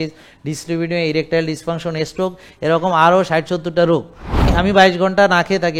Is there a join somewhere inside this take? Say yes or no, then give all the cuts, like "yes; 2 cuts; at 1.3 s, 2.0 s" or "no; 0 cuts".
yes; 1 cut; at 4.5 s